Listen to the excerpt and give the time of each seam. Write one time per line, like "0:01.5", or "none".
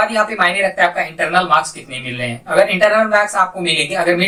none